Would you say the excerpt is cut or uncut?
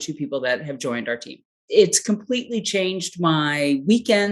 cut